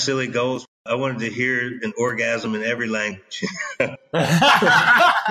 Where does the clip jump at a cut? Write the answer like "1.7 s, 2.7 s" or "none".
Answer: 3.9 s